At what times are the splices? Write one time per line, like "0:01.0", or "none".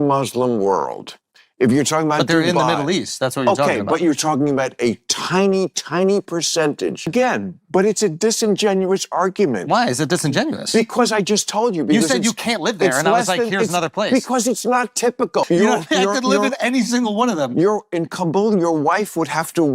0:07.1
0:15.5